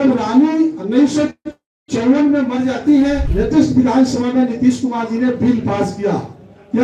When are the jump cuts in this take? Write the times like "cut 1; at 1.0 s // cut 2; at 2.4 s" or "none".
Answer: cut 1; at 3.3 s